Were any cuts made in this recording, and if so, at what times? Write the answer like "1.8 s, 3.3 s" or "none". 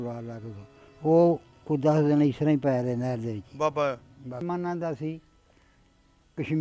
4.4 s